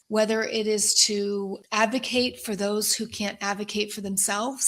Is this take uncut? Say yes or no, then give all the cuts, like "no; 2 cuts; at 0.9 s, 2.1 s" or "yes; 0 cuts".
no; 1 cut; at 1.6 s